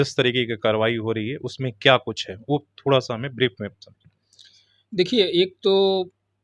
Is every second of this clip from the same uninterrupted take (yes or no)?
yes